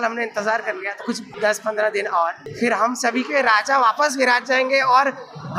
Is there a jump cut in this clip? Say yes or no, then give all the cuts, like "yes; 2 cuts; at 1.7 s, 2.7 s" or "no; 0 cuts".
yes; 2 cuts; at 1.3 s, 2.4 s